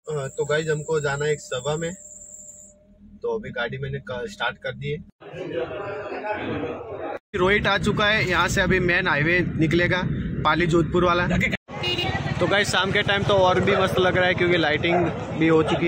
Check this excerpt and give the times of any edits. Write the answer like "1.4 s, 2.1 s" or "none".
5.2 s, 7.2 s, 11.5 s